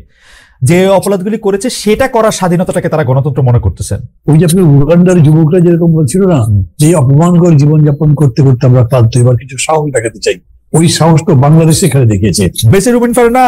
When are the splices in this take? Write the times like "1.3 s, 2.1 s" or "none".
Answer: 4.1 s, 12.6 s